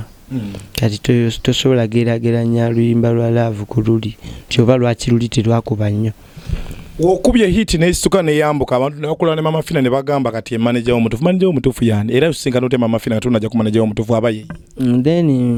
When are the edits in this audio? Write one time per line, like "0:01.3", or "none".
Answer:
none